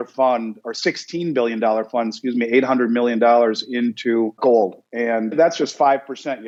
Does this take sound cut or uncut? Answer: uncut